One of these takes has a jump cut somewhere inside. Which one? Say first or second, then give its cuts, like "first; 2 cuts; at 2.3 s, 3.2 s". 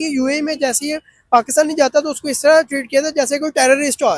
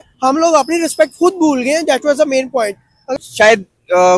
second; 1 cut; at 3.1 s